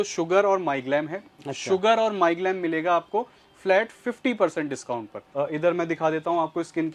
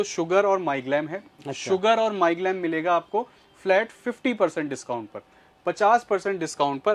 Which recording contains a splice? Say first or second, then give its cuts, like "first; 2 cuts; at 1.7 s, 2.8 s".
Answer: first; 1 cut; at 5.2 s